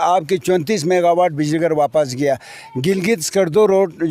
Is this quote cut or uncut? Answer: uncut